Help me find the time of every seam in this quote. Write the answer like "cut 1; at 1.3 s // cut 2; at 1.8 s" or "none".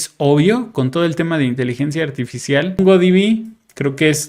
cut 1; at 2.8 s